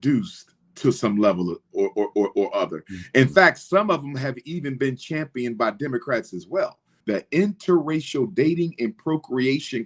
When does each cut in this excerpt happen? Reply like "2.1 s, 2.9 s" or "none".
6.9 s

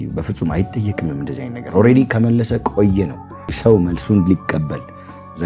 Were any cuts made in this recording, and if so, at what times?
3.4 s

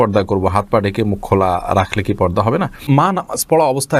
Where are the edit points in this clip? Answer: 3.1 s

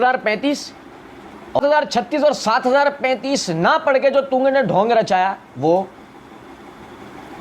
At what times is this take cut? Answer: 1.6 s

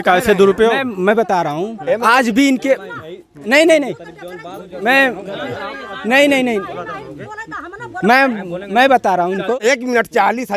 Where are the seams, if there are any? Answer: 9.6 s

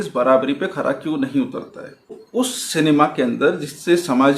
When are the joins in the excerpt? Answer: 2.2 s

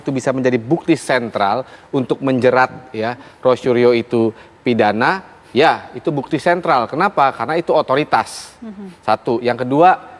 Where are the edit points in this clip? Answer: none

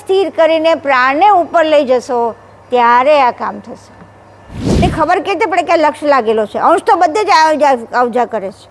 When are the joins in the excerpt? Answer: 4.8 s

